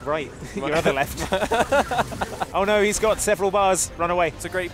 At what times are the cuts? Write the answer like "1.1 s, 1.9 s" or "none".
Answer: 2.4 s